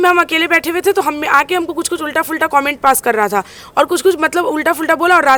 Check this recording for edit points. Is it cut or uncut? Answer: uncut